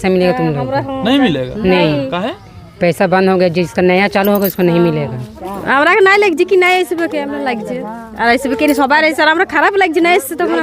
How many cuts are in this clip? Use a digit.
1